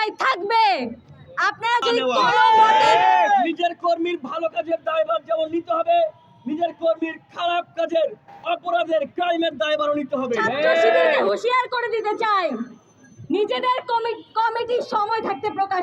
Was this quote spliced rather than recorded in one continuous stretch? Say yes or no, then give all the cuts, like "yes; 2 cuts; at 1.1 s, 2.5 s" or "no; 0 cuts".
yes; 2 cuts; at 2.3 s, 11.2 s